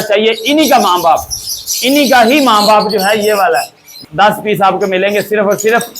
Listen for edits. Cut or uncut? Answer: cut